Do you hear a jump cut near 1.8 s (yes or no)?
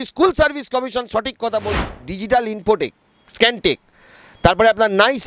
yes